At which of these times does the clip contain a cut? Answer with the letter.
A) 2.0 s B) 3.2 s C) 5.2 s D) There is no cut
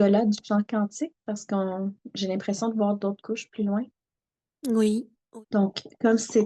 C